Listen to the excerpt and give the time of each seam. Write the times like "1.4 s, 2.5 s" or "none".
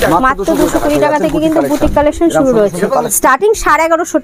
3.1 s